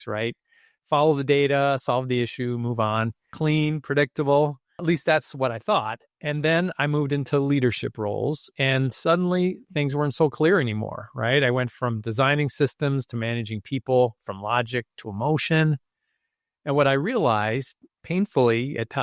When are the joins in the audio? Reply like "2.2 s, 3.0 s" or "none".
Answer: 3.2 s, 4.8 s